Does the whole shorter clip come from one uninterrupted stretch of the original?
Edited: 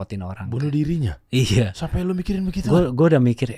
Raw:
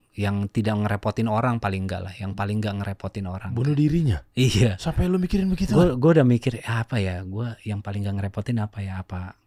yes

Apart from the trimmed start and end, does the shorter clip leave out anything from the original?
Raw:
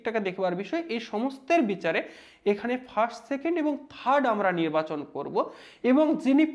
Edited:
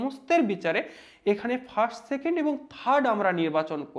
no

